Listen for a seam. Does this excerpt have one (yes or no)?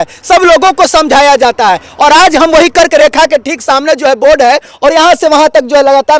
no